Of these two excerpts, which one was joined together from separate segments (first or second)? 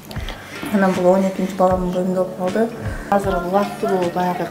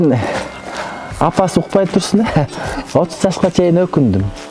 first